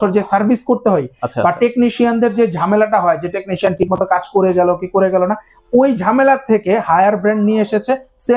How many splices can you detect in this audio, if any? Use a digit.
0